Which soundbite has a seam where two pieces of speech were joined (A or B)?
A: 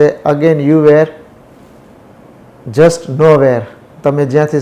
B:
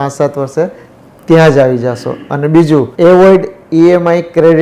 B